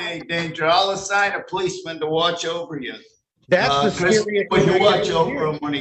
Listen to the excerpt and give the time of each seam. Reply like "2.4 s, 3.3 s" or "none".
none